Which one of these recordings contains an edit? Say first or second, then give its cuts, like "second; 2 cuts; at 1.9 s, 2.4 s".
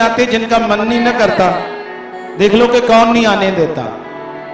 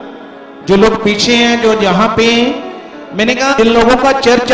second; 1 cut; at 3.6 s